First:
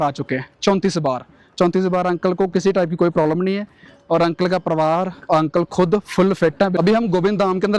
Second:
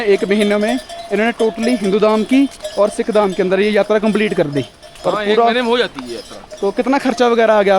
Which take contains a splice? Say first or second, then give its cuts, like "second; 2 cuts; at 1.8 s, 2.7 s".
first; 1 cut; at 6.8 s